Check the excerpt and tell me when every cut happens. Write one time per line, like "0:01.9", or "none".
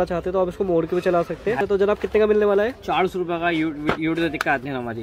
0:01.6